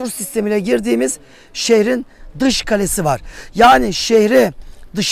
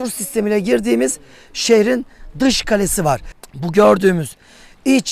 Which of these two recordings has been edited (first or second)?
second